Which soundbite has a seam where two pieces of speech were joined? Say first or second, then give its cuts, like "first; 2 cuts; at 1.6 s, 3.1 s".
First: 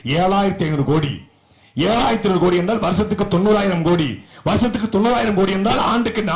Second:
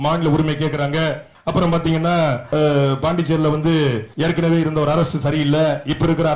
second; 3 cuts; at 1.3 s, 2.4 s, 4.1 s